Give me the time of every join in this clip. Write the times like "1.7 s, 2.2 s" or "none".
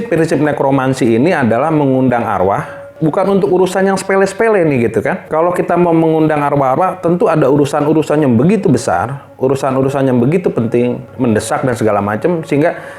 2.9 s, 5.3 s, 11.1 s